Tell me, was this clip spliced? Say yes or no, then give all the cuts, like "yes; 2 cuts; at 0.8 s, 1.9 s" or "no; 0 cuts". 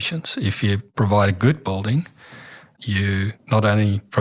yes; 2 cuts; at 0.9 s, 3.0 s